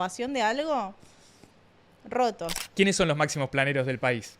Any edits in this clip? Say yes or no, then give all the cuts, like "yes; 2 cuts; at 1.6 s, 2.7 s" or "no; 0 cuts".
yes; 1 cut; at 2.6 s